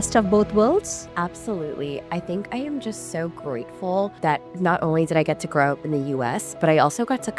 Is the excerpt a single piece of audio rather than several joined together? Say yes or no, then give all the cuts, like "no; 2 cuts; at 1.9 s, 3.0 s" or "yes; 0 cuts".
no; 2 cuts; at 1.0 s, 4.1 s